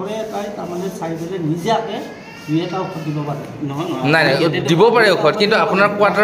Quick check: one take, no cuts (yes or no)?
yes